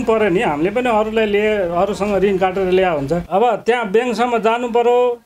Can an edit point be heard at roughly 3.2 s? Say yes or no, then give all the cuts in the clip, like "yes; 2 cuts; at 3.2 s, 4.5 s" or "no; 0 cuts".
yes; 1 cut; at 3.2 s